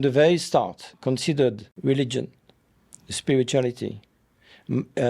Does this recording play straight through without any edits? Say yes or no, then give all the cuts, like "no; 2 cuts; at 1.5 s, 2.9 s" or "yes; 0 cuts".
no; 1 cut; at 1.7 s